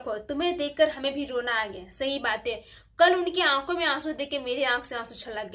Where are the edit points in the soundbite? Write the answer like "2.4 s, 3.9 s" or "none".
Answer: none